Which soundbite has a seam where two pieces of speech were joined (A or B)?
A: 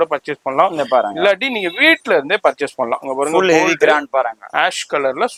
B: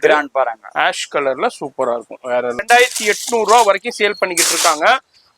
B